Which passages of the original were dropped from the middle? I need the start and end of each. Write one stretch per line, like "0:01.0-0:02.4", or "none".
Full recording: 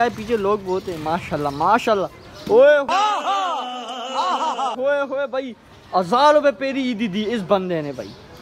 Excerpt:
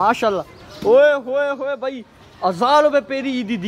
0:02.9-0:04.7